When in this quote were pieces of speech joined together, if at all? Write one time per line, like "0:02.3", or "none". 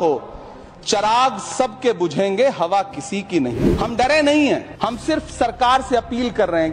0:03.7
0:04.7